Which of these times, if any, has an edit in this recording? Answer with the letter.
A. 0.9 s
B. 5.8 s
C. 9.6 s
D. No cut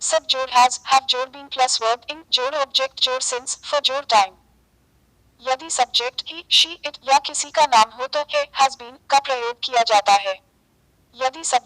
A